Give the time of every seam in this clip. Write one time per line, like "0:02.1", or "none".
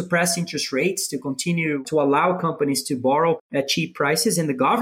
0:01.8
0:03.5